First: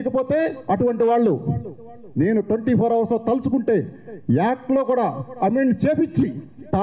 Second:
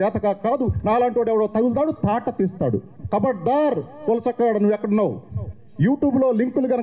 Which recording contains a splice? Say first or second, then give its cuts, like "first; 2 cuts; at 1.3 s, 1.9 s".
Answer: second; 1 cut; at 2.9 s